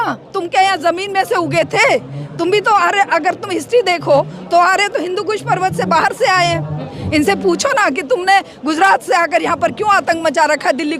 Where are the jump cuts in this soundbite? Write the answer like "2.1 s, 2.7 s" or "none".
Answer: 7.0 s